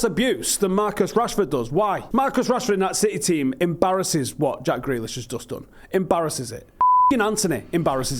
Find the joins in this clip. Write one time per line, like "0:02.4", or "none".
0:02.0